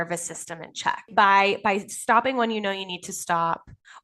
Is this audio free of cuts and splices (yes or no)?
no